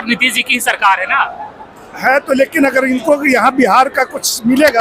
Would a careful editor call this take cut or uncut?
uncut